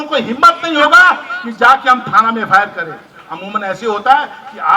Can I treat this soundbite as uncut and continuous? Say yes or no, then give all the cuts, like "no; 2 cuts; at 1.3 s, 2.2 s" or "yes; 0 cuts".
yes; 0 cuts